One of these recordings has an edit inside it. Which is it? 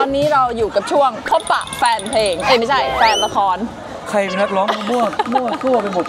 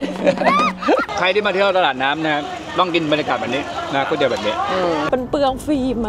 second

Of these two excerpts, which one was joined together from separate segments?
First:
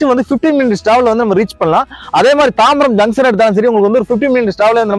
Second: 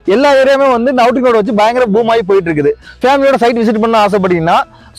second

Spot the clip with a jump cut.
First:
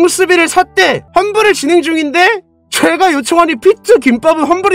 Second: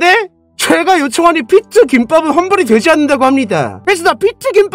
first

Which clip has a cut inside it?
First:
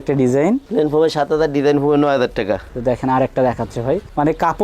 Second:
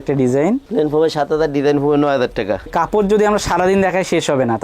second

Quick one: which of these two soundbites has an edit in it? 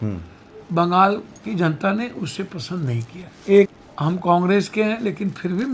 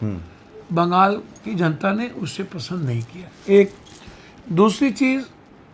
first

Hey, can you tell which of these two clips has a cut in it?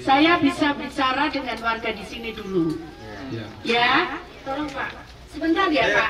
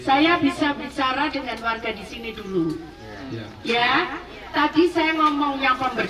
first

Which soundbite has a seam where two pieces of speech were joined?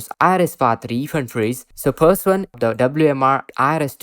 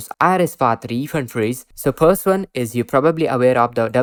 first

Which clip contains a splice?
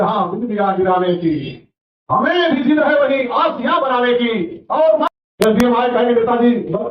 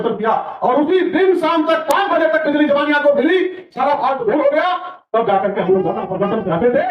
first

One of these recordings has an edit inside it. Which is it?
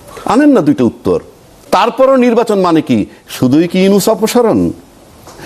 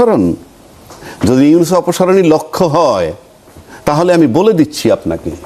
first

